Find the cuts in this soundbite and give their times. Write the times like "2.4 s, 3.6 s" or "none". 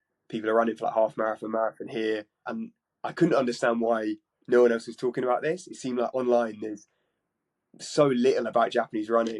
2.5 s